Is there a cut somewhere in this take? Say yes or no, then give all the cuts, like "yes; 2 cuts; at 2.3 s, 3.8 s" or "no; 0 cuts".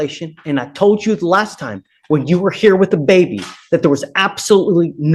no; 0 cuts